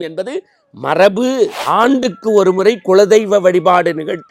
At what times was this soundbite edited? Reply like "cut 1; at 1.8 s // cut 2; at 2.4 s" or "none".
cut 1; at 1.6 s